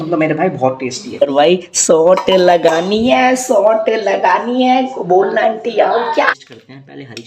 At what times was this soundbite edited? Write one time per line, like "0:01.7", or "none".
0:01.2
0:06.3